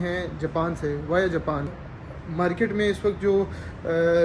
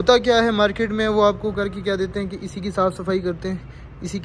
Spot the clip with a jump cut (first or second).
first